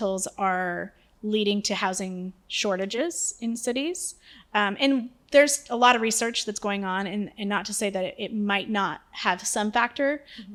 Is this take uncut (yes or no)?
yes